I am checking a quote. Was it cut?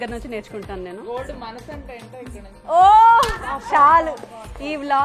no; 0 cuts

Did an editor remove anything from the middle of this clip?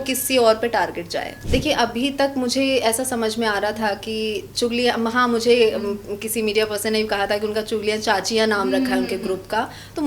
yes; 1 cut; at 1.5 s

